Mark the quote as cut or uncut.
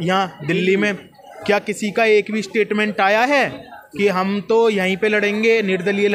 uncut